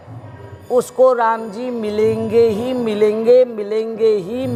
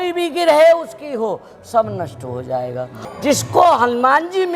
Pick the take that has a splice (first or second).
second